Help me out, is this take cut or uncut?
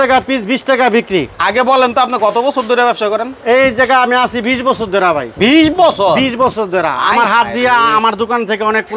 uncut